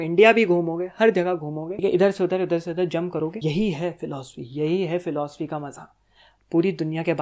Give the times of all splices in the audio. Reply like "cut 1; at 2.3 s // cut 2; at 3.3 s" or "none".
cut 1; at 1.8 s // cut 2; at 3.4 s